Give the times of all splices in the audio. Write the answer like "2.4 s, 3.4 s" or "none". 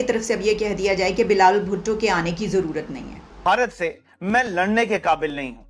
3.3 s